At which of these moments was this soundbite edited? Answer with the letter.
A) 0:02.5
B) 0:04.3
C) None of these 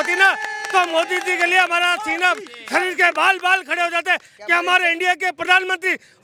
C